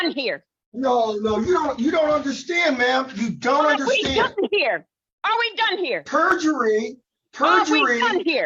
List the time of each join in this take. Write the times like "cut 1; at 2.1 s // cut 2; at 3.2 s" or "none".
none